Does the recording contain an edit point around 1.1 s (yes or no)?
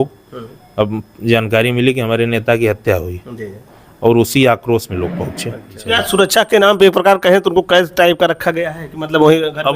no